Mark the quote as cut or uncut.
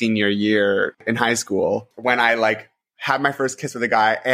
cut